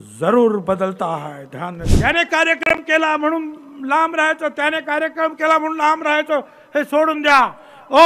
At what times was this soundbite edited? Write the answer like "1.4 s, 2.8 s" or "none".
1.9 s